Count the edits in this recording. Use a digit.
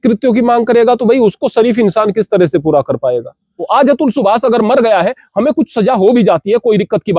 1